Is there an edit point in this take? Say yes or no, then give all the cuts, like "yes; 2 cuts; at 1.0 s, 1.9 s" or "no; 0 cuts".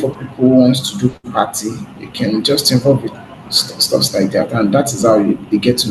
no; 0 cuts